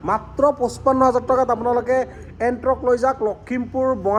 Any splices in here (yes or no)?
no